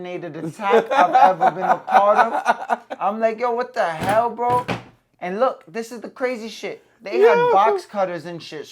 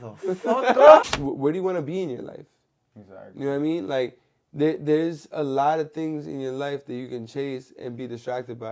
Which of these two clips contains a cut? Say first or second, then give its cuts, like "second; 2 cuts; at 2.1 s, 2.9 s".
second; 1 cut; at 1.0 s